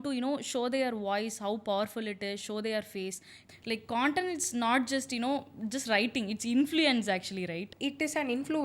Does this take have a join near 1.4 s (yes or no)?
no